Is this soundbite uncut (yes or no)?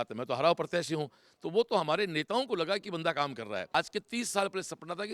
no